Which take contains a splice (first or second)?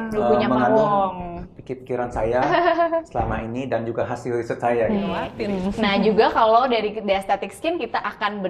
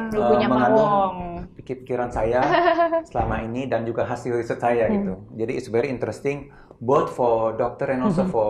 first